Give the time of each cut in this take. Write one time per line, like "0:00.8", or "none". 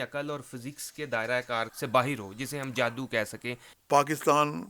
0:01.7
0:03.7